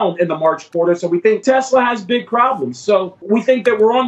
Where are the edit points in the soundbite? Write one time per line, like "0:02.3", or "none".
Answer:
0:01.4
0:03.1